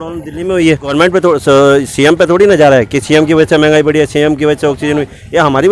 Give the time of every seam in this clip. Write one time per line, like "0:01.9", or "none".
0:00.9